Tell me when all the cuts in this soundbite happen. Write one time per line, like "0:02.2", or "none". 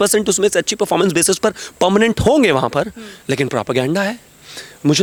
none

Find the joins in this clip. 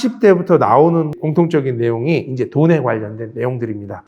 0:01.2

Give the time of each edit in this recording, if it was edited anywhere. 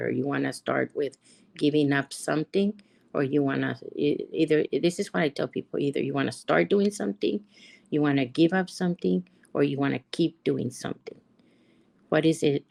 none

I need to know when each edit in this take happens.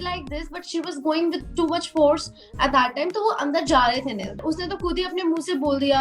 0:04.3

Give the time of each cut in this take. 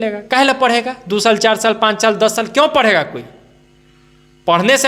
none

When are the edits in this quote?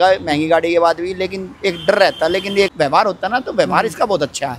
0:02.7

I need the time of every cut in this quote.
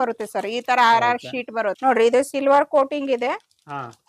0:01.7

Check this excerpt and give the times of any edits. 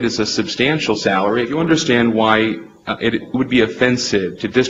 0:01.5

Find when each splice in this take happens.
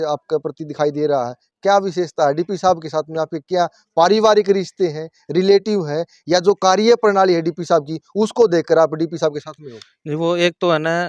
none

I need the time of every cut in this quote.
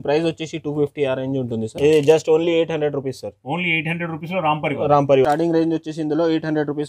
0:01.7
0:05.2

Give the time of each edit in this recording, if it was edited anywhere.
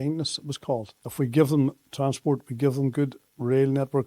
0:01.0

